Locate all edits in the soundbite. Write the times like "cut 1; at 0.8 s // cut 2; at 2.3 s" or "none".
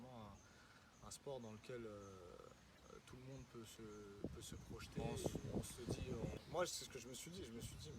cut 1; at 6.3 s

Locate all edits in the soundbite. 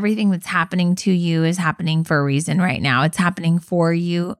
none

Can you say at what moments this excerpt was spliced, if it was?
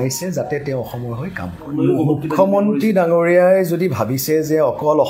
cut 1; at 1.7 s

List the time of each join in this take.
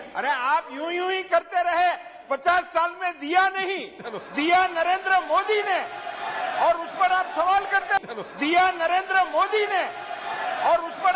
cut 1; at 8.0 s

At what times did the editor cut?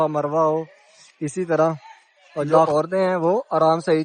cut 1; at 2.7 s

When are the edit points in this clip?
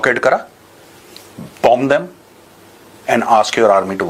none

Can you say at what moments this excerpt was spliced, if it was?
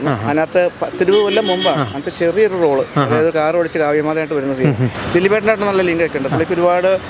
cut 1; at 4.9 s

